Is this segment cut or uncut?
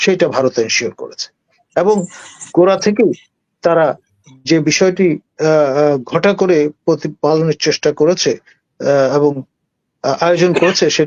uncut